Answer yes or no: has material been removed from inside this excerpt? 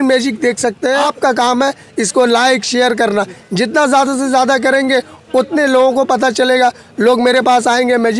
yes